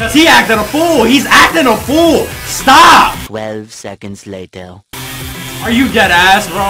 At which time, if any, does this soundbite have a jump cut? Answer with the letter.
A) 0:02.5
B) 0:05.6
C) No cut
B